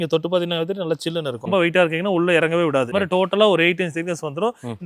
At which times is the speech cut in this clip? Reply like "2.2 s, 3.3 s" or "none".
1.5 s, 2.9 s